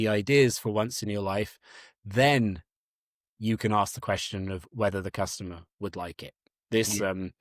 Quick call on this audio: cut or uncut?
uncut